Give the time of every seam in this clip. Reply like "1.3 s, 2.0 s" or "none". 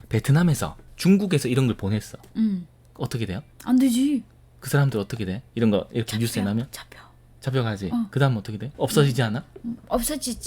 0.9 s